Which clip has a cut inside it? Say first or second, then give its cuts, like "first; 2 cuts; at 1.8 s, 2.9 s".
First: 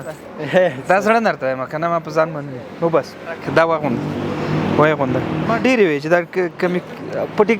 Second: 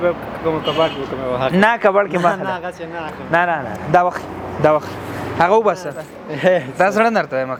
first; 2 cuts; at 3.4 s, 5.5 s